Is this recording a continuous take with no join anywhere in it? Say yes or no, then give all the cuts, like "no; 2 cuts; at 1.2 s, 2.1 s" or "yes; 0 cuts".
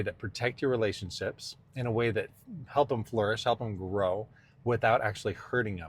yes; 0 cuts